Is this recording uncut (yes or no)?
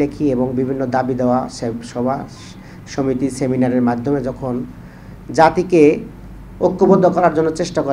yes